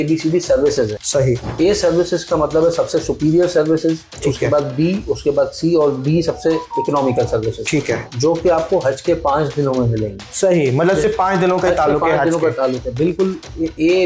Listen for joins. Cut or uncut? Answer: cut